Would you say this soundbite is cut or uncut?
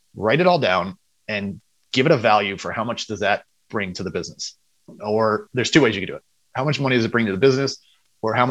uncut